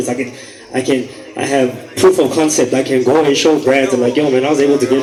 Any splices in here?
no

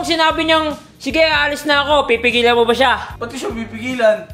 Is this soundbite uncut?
no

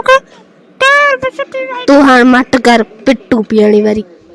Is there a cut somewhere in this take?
yes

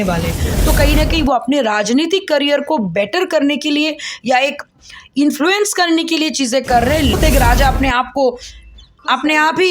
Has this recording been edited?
yes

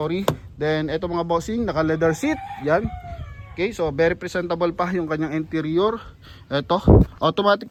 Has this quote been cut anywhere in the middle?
no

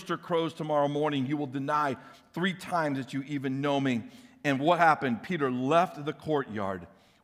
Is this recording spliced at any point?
no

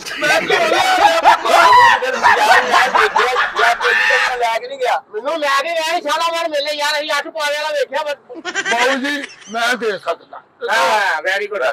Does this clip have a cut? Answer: no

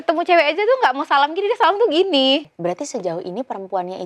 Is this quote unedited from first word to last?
no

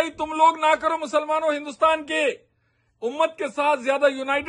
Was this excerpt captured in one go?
yes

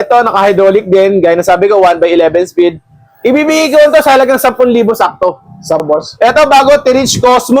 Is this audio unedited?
no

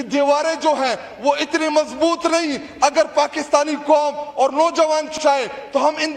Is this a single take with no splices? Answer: yes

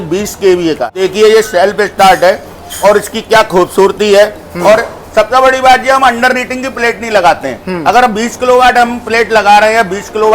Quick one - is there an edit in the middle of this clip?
yes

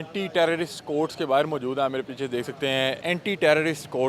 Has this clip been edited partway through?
no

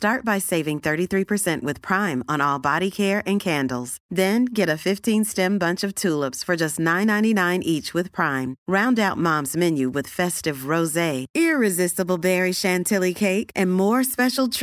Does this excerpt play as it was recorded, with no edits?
yes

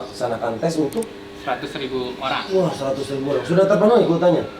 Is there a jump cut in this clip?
no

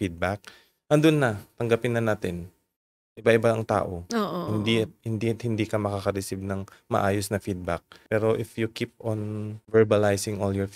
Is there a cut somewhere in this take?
yes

